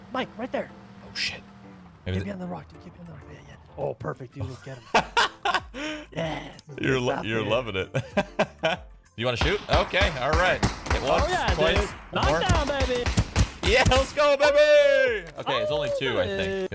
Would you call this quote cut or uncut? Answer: uncut